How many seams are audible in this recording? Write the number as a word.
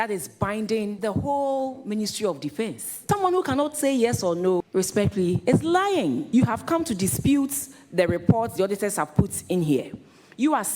four